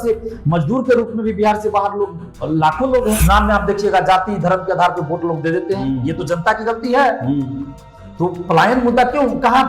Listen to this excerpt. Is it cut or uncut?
cut